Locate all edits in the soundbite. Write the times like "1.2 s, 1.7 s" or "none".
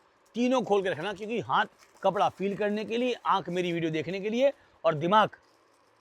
none